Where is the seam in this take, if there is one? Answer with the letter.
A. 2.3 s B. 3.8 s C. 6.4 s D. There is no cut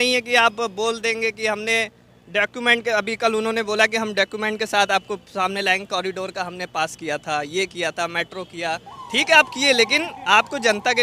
D